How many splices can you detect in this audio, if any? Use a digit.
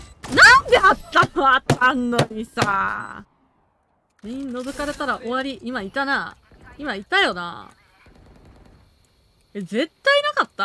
1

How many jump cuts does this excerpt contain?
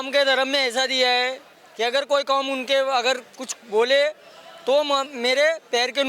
0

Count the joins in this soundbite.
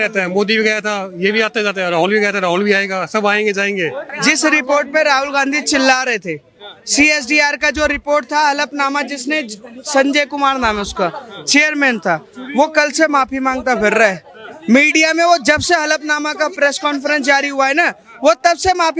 1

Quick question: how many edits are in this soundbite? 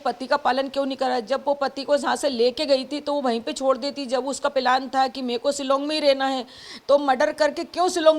0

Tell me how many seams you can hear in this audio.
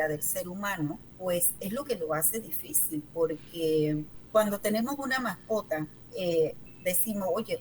4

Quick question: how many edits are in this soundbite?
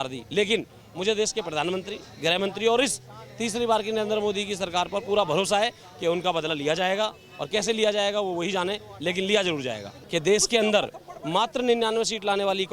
1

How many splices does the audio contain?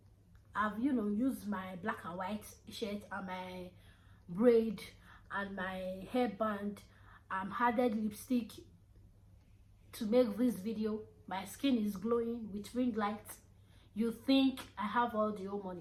0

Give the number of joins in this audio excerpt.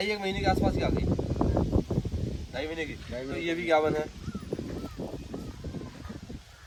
0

